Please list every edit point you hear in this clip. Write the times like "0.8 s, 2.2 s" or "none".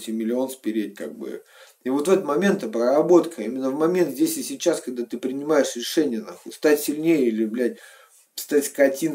none